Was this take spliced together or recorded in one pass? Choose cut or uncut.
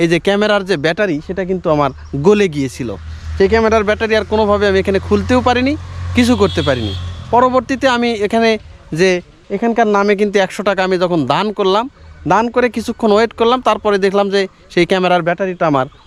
uncut